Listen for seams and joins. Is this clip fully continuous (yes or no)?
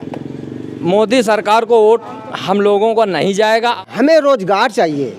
no